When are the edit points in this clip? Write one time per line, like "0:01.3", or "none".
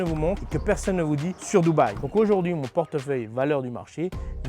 0:02.0